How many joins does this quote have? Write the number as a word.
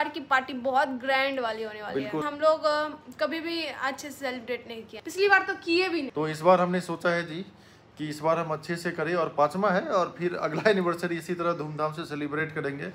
three